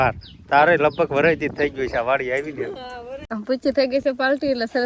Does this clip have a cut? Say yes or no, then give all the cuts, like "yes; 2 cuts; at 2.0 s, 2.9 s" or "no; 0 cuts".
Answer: yes; 1 cut; at 3.3 s